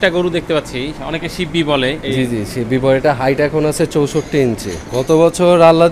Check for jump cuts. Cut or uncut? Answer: cut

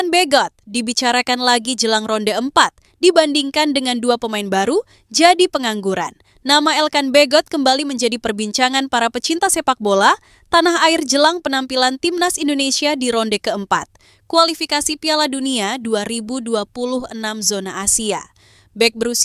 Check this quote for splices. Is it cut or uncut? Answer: uncut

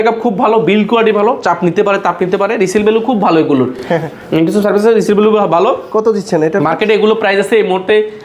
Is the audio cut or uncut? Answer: uncut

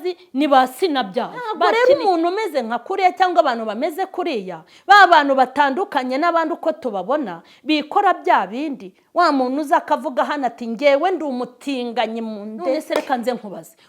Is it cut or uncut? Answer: cut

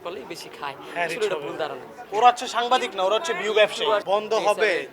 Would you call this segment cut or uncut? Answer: cut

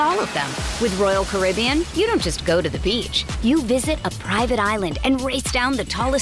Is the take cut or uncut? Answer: uncut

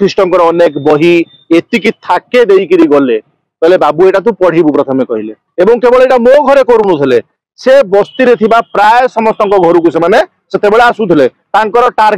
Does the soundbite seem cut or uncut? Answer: cut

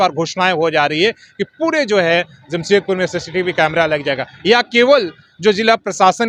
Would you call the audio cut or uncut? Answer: uncut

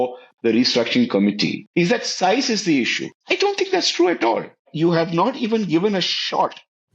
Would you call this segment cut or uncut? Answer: cut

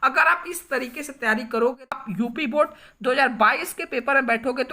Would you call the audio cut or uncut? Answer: cut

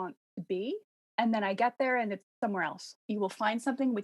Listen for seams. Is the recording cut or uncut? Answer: cut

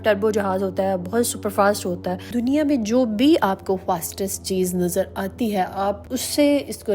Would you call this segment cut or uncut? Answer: uncut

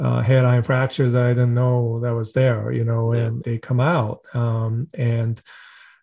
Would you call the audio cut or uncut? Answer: uncut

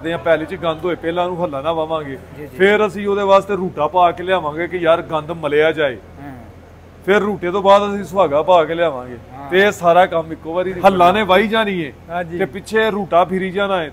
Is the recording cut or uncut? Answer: cut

